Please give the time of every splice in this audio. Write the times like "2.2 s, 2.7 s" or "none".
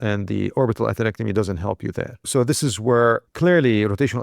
2.3 s, 3.3 s